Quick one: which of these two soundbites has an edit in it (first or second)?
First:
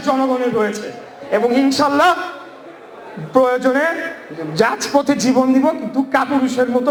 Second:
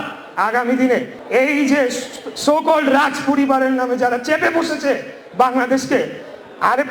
second